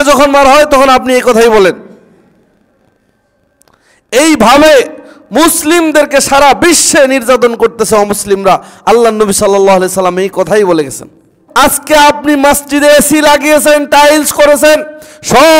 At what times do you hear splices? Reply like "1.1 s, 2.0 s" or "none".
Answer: 11.3 s